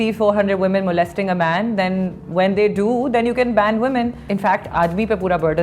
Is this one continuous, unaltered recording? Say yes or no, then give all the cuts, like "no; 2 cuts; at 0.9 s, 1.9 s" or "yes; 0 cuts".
no; 1 cut; at 4.3 s